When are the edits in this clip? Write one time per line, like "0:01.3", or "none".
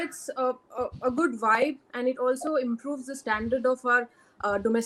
none